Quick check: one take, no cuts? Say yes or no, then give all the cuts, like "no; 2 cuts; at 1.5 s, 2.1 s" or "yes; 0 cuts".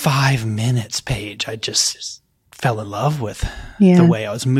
yes; 0 cuts